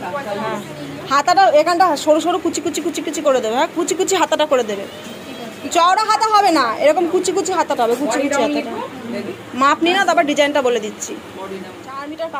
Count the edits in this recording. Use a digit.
0